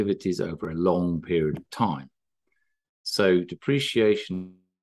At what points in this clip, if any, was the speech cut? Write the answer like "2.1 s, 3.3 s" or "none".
none

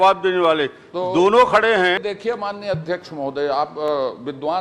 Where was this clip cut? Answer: 2.0 s

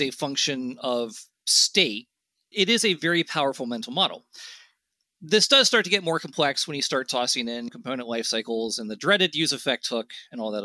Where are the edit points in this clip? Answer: 2.5 s, 7.7 s

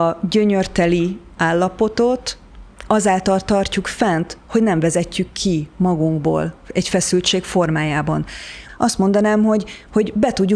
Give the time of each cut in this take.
8.6 s

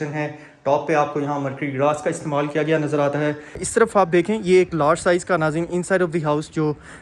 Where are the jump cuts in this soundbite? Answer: 3.6 s

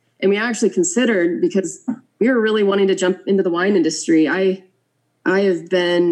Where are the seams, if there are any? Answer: none

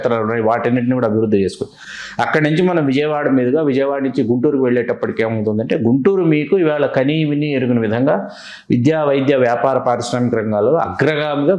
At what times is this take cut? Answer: none

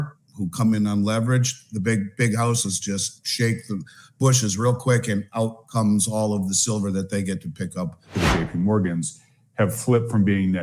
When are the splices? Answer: 8.1 s

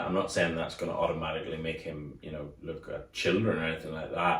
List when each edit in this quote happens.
none

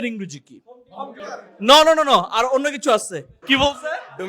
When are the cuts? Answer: 1.2 s, 3.3 s

